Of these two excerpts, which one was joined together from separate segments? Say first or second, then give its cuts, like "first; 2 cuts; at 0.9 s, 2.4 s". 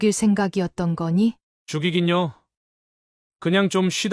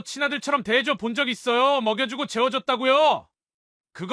first; 1 cut; at 1.5 s